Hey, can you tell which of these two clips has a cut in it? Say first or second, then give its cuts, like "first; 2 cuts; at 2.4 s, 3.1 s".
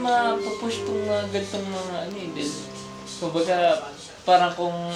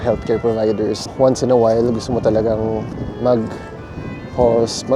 second; 2 cuts; at 1.1 s, 3.0 s